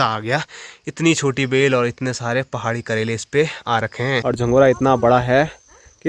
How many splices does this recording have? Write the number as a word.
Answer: one